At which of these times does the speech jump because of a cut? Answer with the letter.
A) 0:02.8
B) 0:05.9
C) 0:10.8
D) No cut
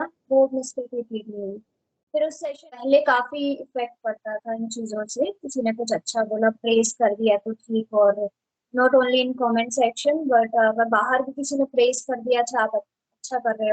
A